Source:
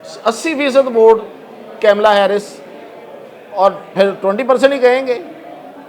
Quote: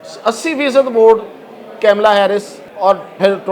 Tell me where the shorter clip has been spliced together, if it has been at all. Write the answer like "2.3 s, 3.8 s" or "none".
2.6 s